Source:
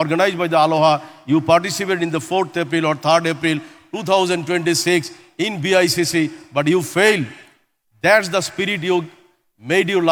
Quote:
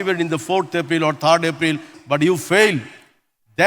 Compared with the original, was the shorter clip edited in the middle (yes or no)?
yes